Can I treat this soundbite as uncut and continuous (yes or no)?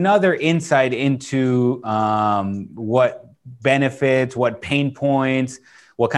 yes